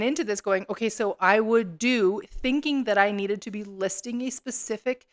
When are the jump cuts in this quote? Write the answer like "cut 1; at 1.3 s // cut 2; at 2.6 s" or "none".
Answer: none

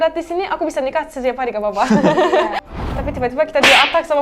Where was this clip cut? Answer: cut 1; at 2.8 s

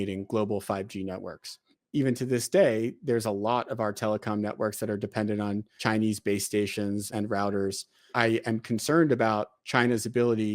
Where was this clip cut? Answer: cut 1; at 1.8 s // cut 2; at 5.8 s // cut 3; at 7.1 s // cut 4; at 8.1 s

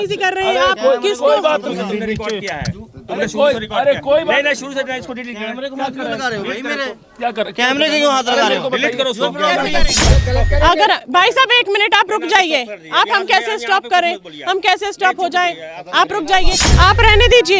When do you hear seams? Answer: cut 1; at 10.0 s // cut 2; at 16.6 s

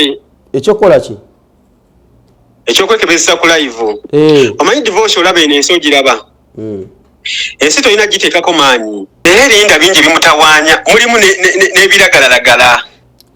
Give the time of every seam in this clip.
cut 1; at 9.0 s

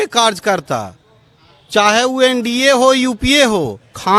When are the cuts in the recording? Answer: none

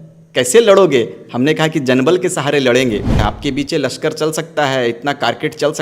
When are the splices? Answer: cut 1; at 3.1 s

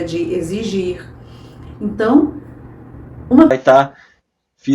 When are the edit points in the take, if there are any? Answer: cut 1; at 3.5 s

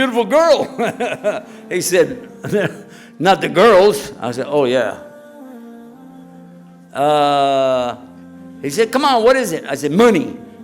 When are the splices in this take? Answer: cut 1; at 5.4 s // cut 2; at 6.9 s

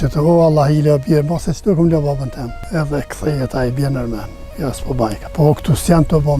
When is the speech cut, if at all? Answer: cut 1; at 2.6 s // cut 2; at 5.2 s

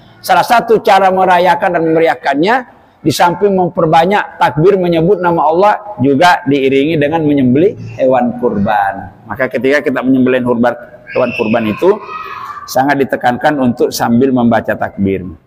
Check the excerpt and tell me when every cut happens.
none

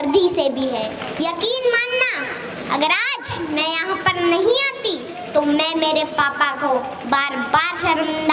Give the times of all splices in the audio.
cut 1; at 1.0 s

